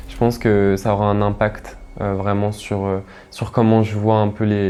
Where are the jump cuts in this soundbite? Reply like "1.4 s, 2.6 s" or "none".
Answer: none